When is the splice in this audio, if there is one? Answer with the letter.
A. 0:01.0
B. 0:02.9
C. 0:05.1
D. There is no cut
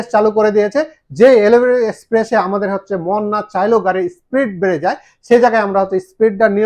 D